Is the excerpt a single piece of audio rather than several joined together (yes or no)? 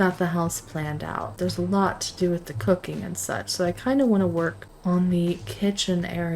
no